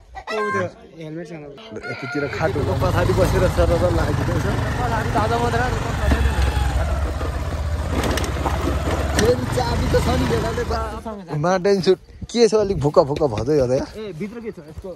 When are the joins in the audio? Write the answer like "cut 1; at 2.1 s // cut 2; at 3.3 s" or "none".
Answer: cut 1; at 2.7 s // cut 2; at 10.8 s